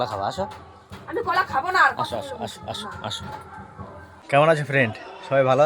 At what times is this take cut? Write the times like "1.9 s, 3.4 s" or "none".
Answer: 4.2 s